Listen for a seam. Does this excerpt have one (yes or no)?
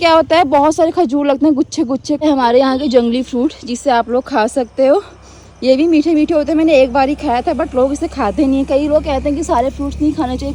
yes